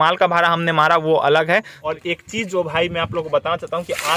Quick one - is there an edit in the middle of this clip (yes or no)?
yes